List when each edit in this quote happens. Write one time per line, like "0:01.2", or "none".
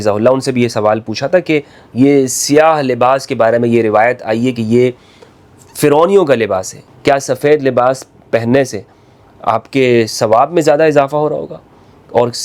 0:06.9